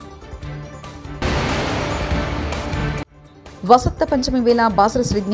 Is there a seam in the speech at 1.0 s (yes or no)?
yes